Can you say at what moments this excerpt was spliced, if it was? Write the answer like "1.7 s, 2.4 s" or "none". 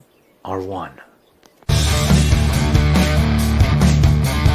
3.6 s